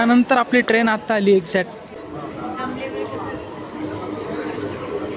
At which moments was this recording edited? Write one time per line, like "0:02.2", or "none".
none

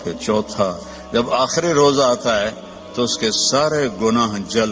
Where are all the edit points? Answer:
none

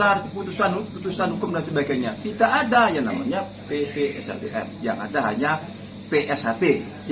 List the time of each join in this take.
none

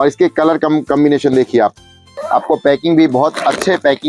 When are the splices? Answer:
0:02.1

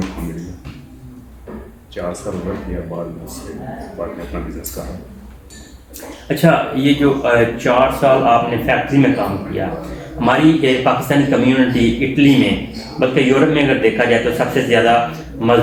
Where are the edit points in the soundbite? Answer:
none

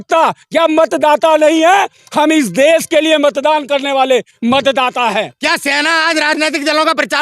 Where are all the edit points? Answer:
0:05.3

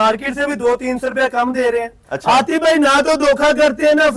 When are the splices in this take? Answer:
0:02.1

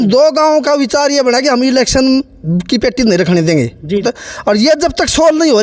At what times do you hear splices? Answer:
0:04.1

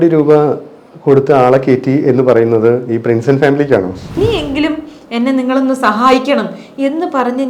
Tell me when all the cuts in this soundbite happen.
0:04.2

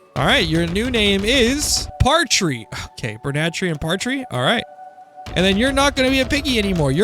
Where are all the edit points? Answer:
0:01.8

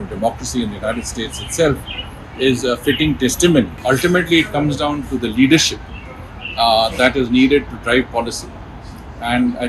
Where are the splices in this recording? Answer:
0:03.7

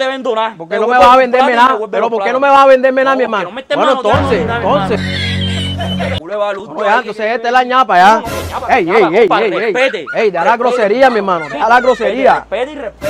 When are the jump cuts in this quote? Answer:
0:06.2

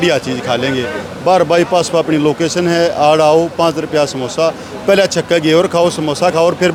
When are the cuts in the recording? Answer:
none

